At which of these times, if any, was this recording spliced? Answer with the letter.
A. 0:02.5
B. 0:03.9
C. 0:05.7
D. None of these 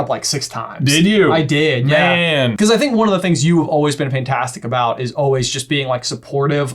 A